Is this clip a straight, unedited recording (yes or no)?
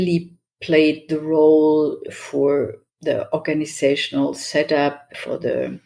yes